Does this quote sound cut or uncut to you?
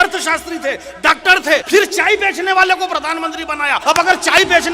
cut